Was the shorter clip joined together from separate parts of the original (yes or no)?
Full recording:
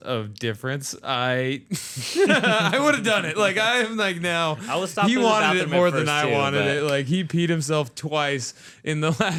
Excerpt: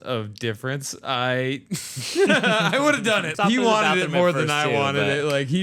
yes